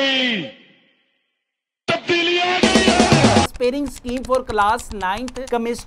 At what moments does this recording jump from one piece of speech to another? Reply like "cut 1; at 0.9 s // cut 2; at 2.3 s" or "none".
cut 1; at 3.5 s